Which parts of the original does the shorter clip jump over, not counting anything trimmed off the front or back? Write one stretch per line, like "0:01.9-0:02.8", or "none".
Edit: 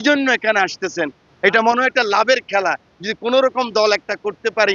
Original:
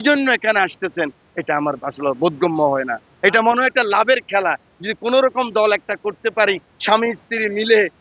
0:01.2-0:03.0